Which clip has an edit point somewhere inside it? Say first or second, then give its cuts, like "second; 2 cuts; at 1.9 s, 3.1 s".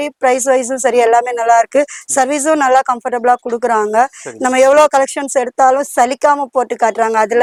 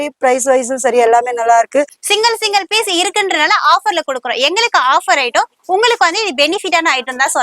second; 1 cut; at 2.0 s